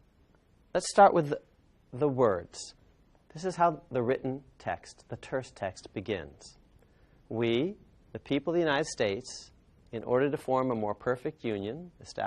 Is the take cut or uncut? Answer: cut